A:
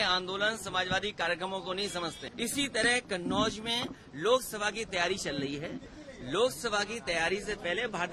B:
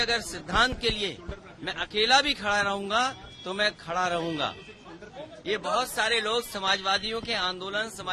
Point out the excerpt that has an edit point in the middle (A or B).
A